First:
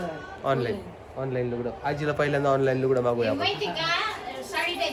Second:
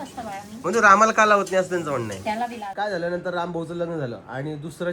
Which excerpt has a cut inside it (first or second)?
second